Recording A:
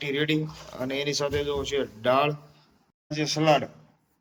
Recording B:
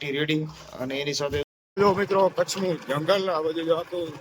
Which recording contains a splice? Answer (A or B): B